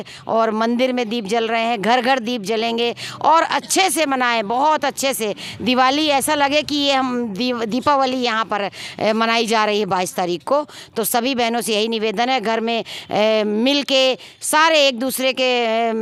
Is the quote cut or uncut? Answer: uncut